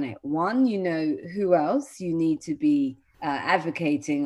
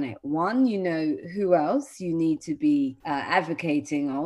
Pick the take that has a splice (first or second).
second